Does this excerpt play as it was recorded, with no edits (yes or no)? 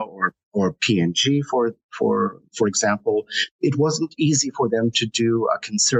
yes